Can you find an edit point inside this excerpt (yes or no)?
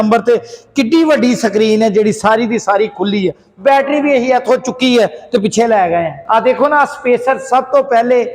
yes